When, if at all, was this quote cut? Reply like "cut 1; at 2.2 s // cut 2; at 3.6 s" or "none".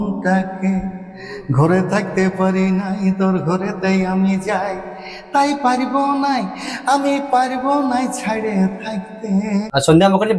cut 1; at 9.5 s